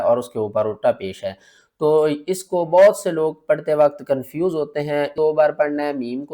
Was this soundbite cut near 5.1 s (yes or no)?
yes